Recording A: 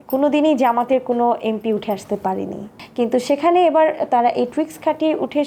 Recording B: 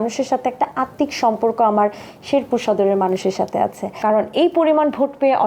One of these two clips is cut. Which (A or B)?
B